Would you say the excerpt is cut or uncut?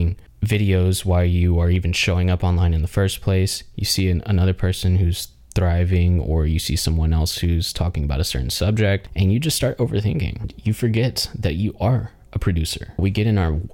cut